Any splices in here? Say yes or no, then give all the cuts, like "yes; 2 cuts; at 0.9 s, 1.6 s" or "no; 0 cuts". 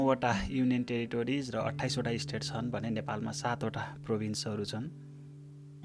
yes; 1 cut; at 4.9 s